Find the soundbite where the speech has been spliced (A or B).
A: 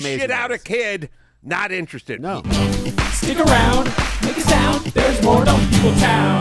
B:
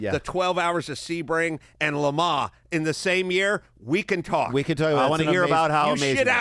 A